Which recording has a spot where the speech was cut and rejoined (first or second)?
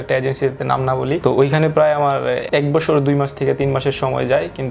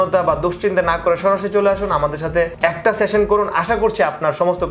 first